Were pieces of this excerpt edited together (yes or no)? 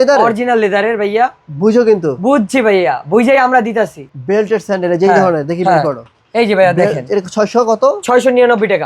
yes